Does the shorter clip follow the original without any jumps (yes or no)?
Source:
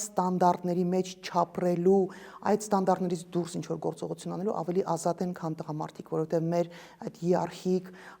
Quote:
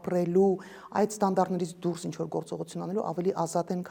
yes